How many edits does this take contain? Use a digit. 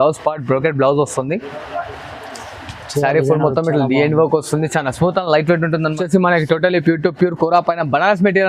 1